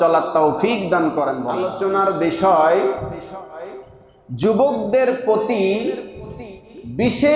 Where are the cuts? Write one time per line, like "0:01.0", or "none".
0:01.6